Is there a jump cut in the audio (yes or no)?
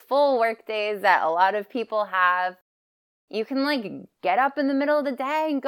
yes